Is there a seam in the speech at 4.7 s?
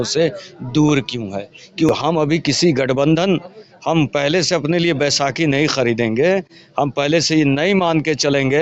no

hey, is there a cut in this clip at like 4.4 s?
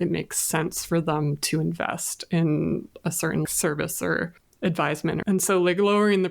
yes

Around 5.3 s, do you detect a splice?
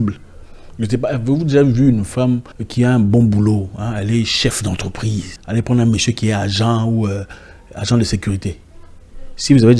yes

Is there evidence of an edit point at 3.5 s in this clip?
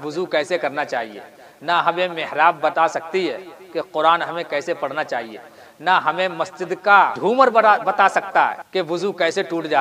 no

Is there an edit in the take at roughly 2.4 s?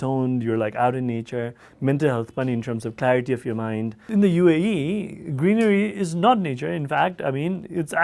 no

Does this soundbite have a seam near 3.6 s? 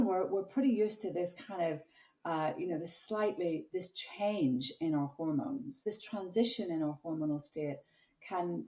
no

